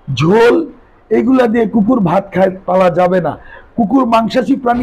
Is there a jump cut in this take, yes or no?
no